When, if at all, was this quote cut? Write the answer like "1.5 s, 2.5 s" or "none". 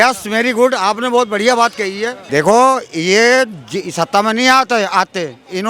2.1 s